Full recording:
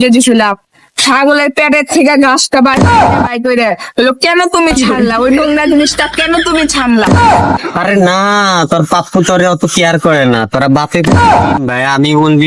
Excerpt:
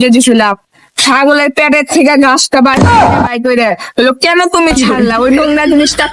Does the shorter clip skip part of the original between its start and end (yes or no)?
no